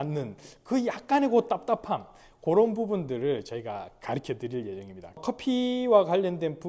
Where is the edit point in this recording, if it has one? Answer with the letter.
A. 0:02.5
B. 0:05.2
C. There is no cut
B